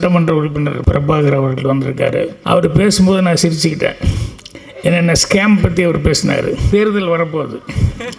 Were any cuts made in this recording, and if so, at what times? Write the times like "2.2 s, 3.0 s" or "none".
0.8 s, 2.4 s, 6.7 s